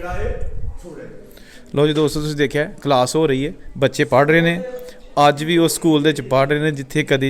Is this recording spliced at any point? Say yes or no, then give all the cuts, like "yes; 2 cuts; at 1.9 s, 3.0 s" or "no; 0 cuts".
no; 0 cuts